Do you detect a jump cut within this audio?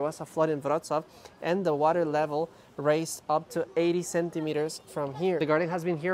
no; 0 cuts

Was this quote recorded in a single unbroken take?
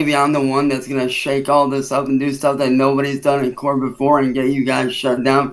yes; 0 cuts

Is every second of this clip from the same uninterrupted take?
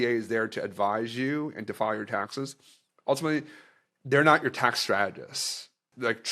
yes; 0 cuts

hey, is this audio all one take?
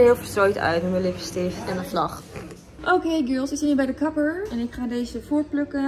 no; 2 cuts; at 1.6 s, 2.7 s

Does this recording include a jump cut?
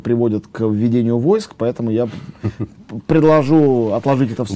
no; 0 cuts

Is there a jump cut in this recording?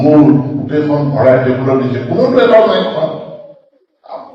no; 0 cuts

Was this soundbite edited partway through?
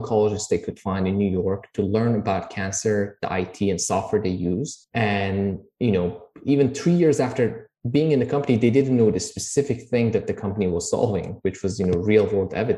no; 0 cuts

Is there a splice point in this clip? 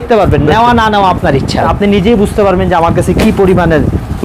yes; 1 cut; at 1.7 s

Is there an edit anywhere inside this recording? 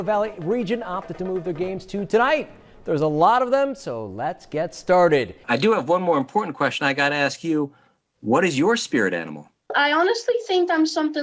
yes; 1 cut; at 5.4 s

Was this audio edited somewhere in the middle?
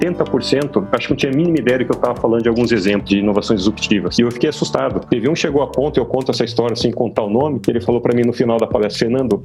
yes; 1 cut; at 7.8 s

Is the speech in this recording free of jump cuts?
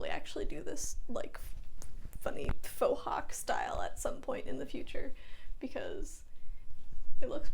yes; 0 cuts

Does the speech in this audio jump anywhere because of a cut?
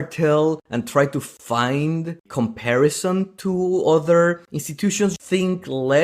yes; 1 cut; at 5.1 s

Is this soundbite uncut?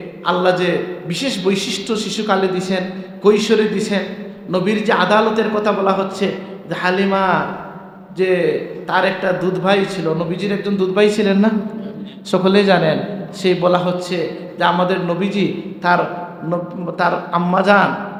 yes; 0 cuts

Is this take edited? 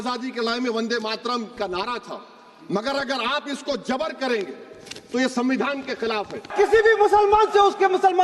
yes; 1 cut; at 6.5 s

